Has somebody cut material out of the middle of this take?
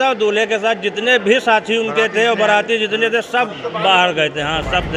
no; 0 cuts

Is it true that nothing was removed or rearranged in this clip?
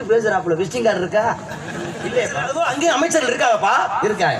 no; 1 cut; at 2.4 s

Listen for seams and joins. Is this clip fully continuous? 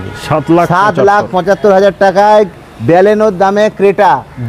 yes; 0 cuts

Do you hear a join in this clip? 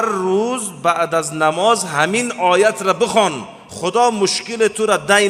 no; 0 cuts

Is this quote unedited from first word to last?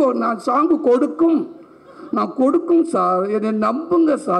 yes; 0 cuts

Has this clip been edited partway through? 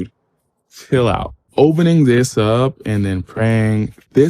yes; 1 cut; at 1.4 s

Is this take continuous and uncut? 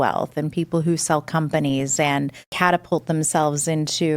no; 1 cut; at 2.4 s

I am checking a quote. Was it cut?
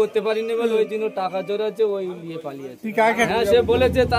yes; 1 cut; at 3.3 s

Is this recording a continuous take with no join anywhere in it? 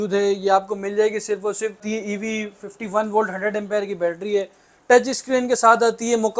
no; 1 cut; at 1.9 s

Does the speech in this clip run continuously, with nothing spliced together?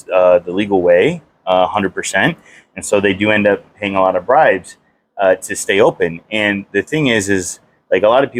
yes; 0 cuts

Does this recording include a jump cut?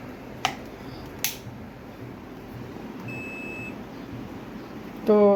no; 0 cuts

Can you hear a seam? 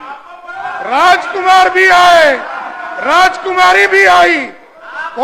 no; 0 cuts

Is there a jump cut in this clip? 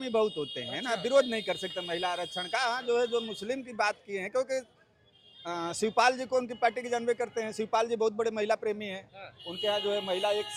no; 0 cuts

